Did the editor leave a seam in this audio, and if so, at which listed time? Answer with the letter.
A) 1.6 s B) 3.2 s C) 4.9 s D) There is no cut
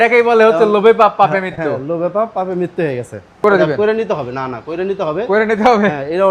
B